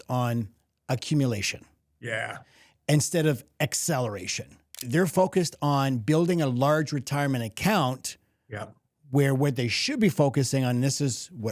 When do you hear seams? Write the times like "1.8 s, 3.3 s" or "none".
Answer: 4.9 s